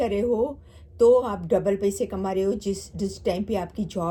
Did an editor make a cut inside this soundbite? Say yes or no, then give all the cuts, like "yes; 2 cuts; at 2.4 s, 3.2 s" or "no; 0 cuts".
no; 0 cuts